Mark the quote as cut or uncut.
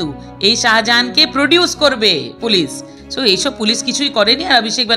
cut